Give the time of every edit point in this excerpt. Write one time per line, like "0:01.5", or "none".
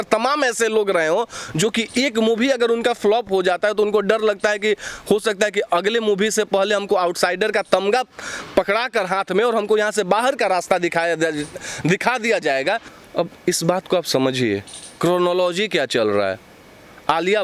0:12.9